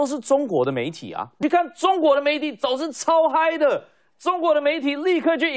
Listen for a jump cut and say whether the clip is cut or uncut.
cut